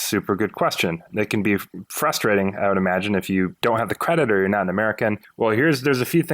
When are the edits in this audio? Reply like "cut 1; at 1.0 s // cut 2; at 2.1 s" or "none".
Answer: cut 1; at 1.1 s // cut 2; at 3.5 s // cut 3; at 5.3 s